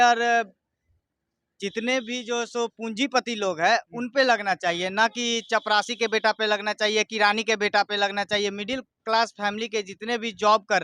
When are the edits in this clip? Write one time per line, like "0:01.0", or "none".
none